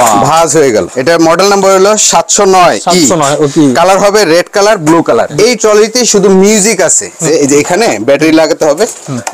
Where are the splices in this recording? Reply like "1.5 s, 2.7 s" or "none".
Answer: 0.9 s, 5.3 s, 7.2 s